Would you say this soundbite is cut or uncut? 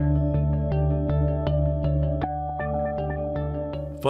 cut